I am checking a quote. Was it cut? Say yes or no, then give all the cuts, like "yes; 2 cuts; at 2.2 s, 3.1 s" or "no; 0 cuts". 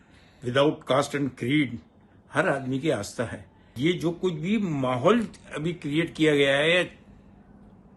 yes; 1 cut; at 3.8 s